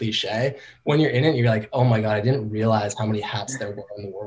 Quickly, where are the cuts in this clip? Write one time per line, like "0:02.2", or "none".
none